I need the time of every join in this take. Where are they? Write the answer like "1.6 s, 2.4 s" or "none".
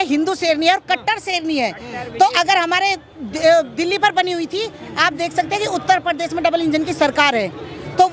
none